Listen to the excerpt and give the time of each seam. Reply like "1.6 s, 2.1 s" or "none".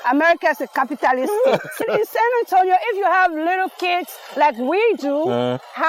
1.8 s